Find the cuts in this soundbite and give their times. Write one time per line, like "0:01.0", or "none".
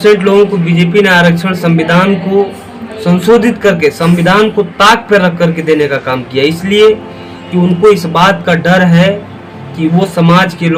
none